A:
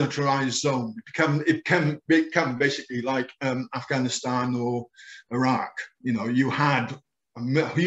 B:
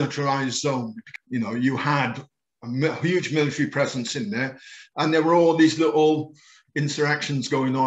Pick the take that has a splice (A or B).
B